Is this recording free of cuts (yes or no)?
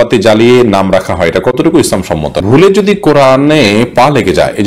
no